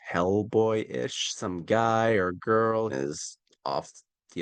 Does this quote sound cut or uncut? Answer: cut